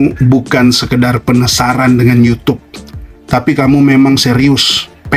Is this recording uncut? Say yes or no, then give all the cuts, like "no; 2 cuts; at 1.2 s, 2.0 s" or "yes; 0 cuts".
yes; 0 cuts